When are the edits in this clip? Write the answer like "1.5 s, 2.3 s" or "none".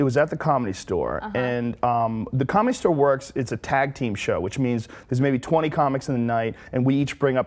5.8 s